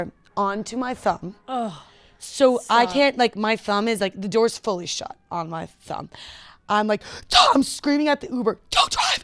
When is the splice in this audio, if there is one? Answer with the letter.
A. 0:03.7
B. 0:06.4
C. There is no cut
C